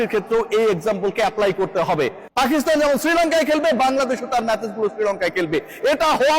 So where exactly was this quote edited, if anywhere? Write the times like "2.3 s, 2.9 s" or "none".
2.2 s